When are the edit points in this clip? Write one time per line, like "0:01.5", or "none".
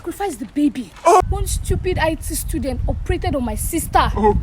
0:01.2